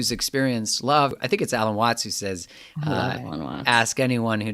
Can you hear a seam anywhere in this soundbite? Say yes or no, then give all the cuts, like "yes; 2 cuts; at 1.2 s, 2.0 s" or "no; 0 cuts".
yes; 1 cut; at 1.1 s